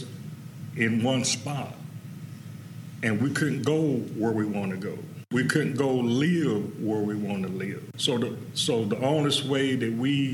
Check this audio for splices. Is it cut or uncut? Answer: cut